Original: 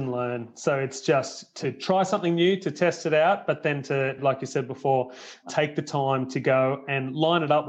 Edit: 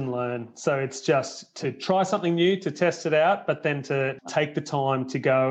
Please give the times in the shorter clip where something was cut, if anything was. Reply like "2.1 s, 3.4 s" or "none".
4.1 s